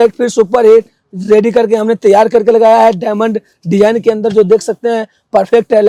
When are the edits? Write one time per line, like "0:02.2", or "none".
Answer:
none